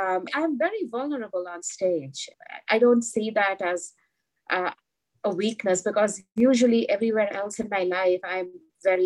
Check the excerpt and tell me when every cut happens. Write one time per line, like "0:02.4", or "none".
none